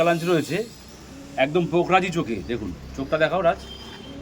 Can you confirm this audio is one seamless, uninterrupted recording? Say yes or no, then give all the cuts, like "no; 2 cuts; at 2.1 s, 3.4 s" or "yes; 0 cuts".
yes; 0 cuts